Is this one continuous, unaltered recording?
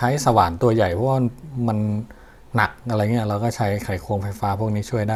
yes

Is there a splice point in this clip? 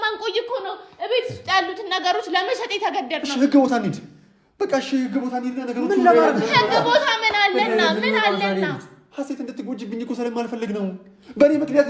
no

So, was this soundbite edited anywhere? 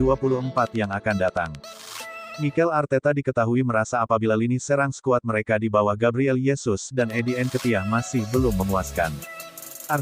no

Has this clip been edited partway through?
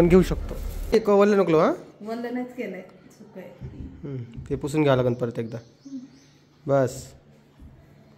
yes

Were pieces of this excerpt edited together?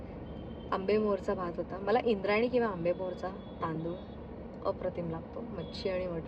no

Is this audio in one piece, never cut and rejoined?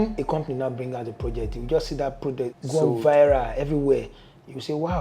no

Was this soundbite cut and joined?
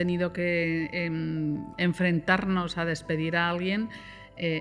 no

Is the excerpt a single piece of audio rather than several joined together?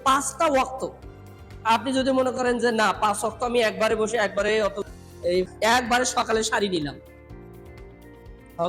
no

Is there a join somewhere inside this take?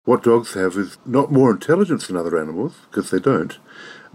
yes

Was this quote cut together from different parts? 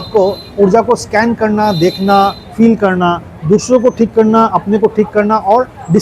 no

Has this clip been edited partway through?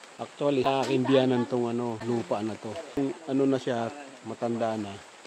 yes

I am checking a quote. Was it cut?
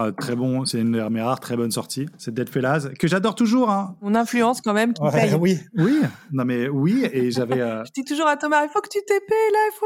yes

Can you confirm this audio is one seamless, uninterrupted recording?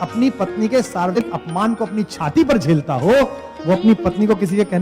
no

